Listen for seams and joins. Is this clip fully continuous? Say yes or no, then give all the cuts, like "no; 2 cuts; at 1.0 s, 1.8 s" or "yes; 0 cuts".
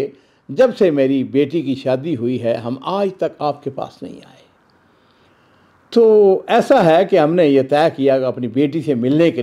yes; 0 cuts